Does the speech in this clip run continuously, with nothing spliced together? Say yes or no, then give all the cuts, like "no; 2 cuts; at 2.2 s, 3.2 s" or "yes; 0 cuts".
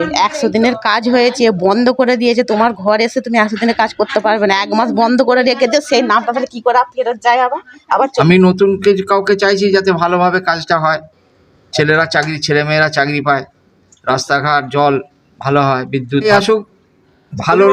no; 2 cuts; at 8.1 s, 16.2 s